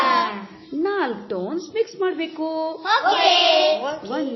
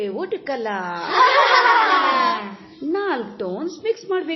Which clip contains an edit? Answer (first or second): first